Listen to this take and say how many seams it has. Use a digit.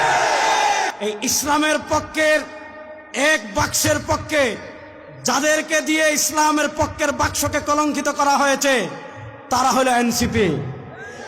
1